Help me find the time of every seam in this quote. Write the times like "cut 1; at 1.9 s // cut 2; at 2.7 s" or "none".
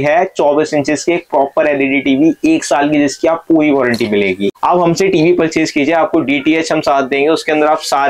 cut 1; at 4.5 s